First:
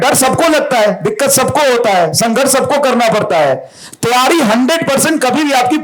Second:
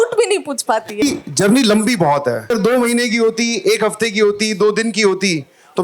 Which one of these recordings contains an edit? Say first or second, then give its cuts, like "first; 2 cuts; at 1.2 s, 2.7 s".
second; 2 cuts; at 1.0 s, 2.5 s